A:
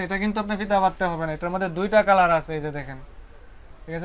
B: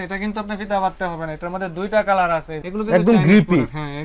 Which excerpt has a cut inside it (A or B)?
B